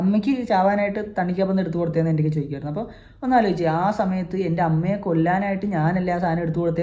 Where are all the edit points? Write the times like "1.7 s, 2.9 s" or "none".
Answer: none